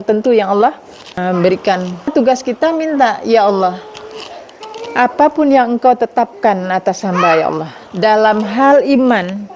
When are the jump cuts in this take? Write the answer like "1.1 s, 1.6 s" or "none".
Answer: 1.2 s, 2.1 s